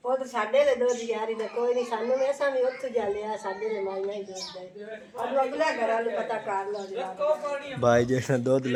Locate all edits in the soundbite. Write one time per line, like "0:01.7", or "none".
none